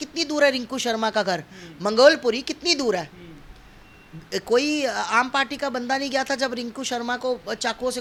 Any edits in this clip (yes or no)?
no